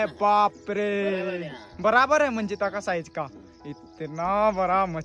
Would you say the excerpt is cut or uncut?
uncut